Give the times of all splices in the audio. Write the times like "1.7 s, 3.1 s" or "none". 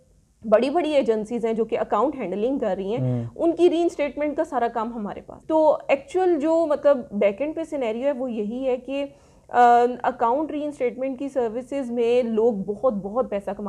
5.4 s

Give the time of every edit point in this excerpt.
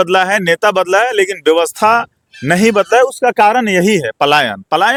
none

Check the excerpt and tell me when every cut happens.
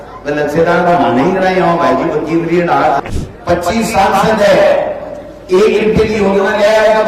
3.0 s

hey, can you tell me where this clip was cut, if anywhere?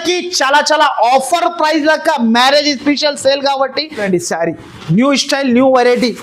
4.0 s

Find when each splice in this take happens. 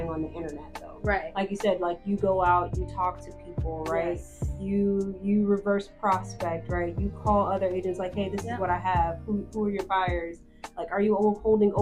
none

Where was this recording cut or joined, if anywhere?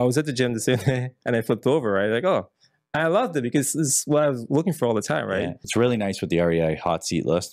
5.7 s

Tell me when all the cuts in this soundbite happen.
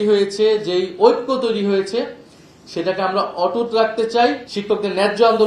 4.5 s

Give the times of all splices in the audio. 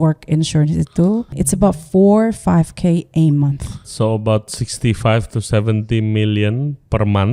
1.4 s, 3.9 s

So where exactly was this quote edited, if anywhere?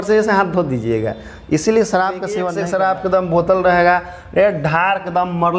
2.5 s

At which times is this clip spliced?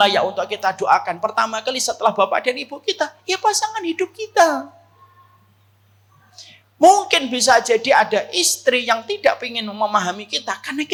none

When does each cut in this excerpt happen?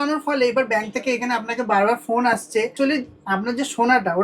2.7 s

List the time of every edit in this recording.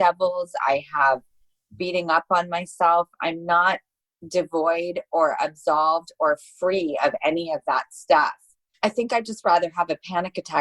none

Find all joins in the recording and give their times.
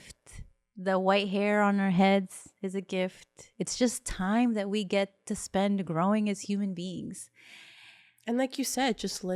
none

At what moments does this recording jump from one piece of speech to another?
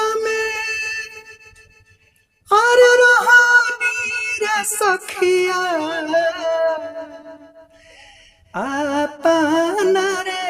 none

